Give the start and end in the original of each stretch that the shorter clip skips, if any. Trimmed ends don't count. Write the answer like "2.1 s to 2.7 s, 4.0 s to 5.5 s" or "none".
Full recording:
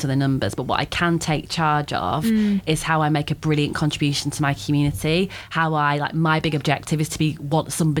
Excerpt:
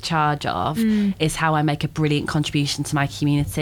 none